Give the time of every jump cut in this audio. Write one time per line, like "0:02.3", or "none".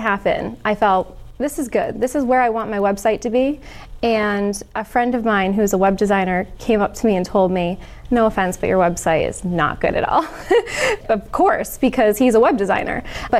none